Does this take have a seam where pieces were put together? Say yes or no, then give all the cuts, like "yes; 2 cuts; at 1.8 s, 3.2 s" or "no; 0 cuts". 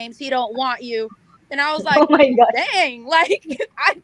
no; 0 cuts